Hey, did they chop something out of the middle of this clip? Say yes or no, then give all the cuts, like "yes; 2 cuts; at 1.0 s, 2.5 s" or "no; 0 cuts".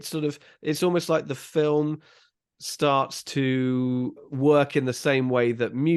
yes; 1 cut; at 4.3 s